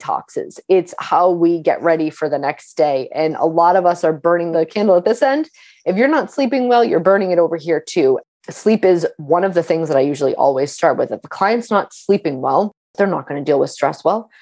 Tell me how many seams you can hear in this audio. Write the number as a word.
three